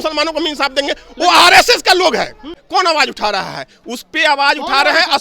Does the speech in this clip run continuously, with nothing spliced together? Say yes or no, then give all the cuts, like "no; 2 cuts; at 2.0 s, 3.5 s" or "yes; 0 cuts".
no; 1 cut; at 2.6 s